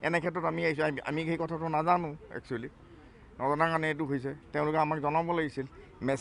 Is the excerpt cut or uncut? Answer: uncut